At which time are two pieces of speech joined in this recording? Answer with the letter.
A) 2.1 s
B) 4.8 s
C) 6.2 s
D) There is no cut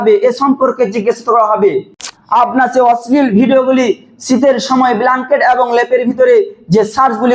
A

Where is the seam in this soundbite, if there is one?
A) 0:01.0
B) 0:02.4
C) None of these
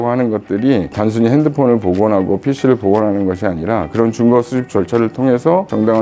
A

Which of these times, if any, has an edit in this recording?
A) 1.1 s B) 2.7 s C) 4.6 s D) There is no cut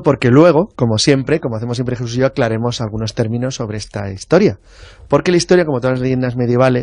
B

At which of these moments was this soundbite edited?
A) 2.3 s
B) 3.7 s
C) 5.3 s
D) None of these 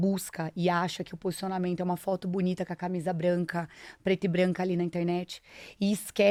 D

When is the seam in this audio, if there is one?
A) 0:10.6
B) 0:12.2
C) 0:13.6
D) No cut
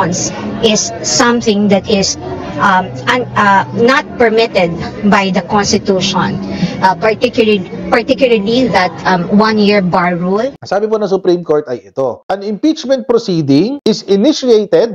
A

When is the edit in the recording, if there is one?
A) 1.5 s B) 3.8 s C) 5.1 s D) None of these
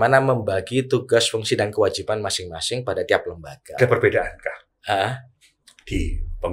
B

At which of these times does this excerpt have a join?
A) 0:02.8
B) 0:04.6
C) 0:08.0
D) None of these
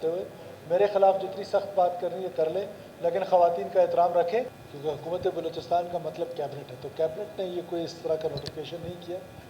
B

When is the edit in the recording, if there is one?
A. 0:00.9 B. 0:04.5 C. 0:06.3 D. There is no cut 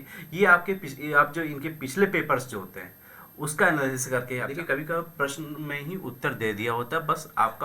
B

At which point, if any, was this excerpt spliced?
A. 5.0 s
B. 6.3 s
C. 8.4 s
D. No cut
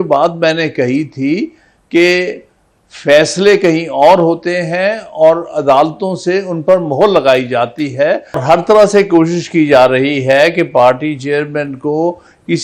C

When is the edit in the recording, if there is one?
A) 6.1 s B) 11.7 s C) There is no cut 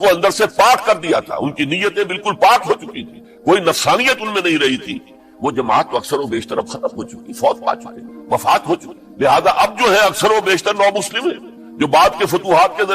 C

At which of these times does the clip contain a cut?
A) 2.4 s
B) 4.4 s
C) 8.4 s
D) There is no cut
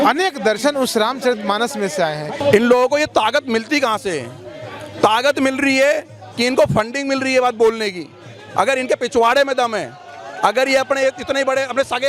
A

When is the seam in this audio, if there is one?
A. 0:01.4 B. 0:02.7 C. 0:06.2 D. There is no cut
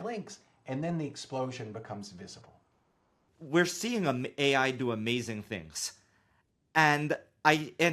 B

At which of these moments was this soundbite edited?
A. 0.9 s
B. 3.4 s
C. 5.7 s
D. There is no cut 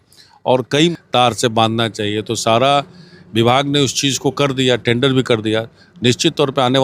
A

